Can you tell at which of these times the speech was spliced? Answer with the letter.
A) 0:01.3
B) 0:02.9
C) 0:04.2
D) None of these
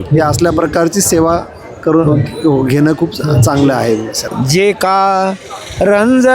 C